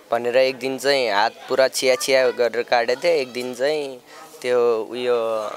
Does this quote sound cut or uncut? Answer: uncut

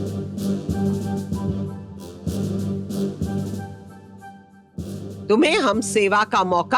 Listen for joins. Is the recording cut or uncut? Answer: uncut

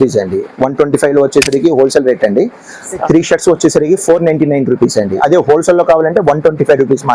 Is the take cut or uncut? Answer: cut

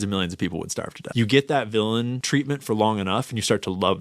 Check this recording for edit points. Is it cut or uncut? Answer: cut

